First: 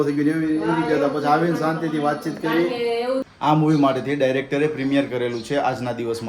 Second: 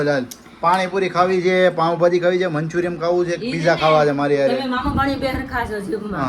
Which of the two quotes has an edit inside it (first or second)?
first